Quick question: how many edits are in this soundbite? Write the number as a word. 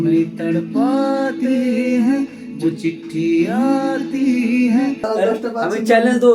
one